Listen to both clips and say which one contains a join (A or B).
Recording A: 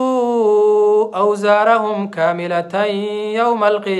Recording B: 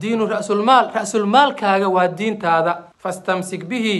B